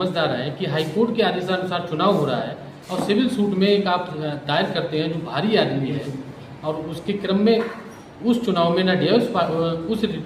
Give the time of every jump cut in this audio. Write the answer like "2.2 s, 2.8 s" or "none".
none